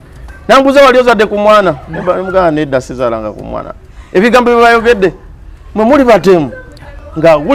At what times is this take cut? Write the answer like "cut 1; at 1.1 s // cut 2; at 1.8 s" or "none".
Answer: none